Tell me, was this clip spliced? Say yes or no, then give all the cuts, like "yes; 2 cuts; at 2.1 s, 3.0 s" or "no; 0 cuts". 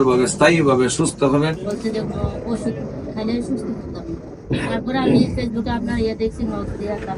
yes; 1 cut; at 1.6 s